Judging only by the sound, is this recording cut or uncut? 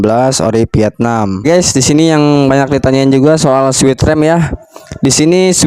cut